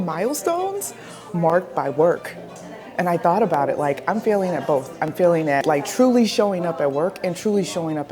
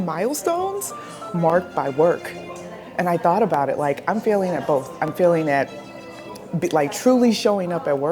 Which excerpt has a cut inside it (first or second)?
first